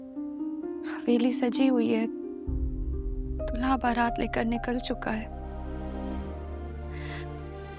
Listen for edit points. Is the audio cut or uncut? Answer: uncut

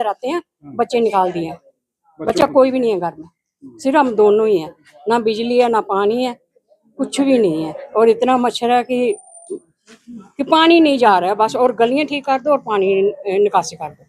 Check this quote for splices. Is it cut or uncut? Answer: uncut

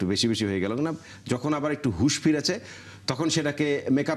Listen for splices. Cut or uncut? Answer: uncut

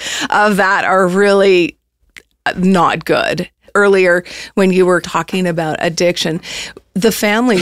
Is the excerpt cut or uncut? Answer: cut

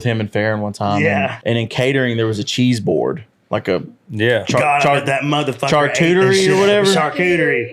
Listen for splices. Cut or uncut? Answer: cut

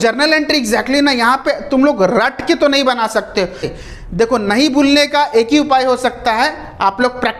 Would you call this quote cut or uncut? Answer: cut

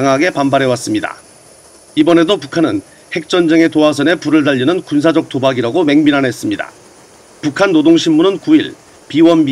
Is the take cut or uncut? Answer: cut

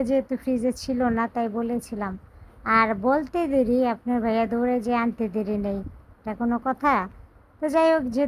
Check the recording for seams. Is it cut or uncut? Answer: uncut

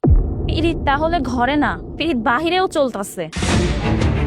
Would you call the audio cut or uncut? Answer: cut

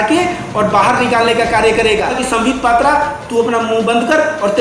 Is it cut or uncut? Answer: cut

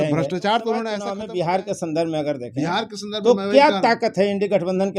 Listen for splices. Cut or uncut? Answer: cut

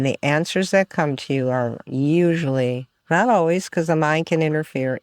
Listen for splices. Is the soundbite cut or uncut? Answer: uncut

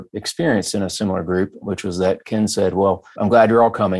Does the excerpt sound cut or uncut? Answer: cut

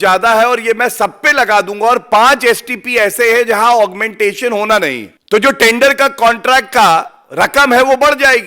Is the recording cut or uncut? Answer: cut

